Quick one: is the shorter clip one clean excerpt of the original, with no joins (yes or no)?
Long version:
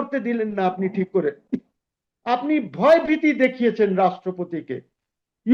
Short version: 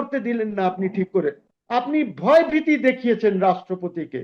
no